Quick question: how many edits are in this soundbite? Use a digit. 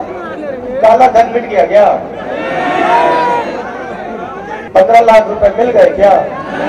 1